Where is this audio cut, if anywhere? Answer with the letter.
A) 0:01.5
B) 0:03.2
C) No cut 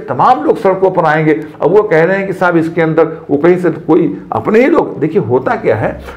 C